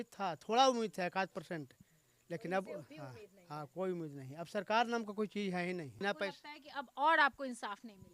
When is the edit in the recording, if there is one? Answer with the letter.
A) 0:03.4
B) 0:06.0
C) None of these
B